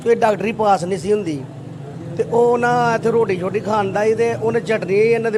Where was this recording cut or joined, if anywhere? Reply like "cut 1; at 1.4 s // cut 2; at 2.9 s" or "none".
none